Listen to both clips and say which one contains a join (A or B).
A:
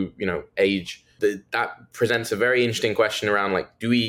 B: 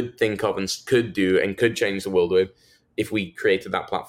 A